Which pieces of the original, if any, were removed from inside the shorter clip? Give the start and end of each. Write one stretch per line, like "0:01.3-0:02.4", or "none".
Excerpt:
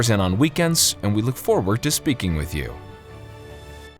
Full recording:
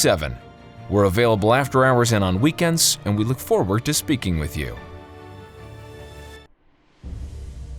0:04.8-0:05.2